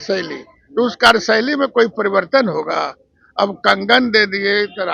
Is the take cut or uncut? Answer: uncut